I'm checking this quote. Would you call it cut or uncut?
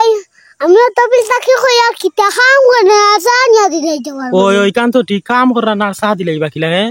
uncut